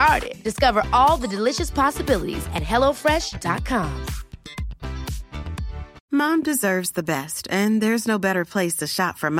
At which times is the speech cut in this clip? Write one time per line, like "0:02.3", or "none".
0:05.9